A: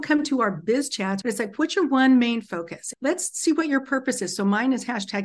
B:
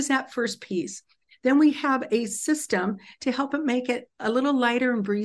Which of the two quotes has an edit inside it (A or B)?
A